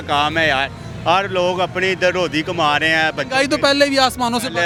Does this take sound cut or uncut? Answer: uncut